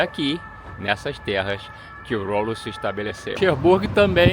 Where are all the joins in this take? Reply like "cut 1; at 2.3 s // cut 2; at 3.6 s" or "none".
cut 1; at 3.2 s